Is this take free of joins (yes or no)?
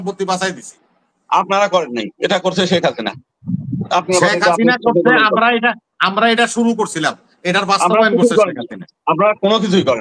yes